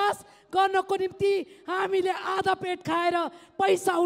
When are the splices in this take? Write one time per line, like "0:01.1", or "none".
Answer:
none